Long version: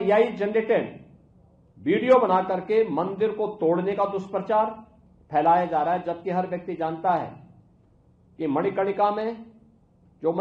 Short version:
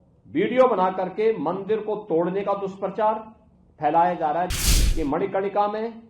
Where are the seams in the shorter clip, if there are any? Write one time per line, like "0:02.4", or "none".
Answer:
0:04.6